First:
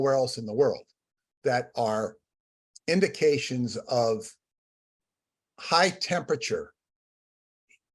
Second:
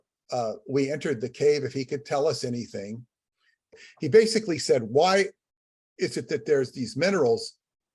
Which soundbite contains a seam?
second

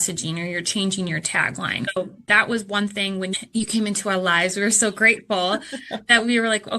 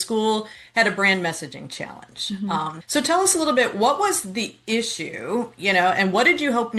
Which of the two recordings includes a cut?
first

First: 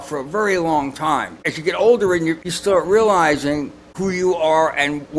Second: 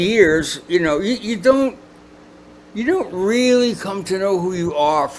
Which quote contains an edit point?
first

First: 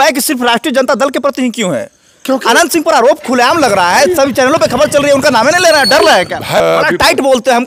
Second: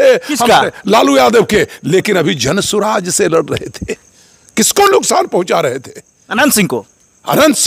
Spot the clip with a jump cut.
first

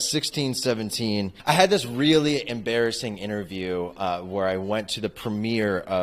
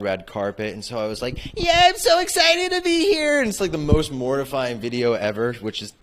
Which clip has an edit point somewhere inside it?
first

